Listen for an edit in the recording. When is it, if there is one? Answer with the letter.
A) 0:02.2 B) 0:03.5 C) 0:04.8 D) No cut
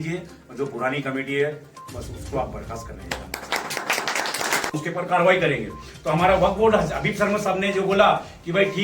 C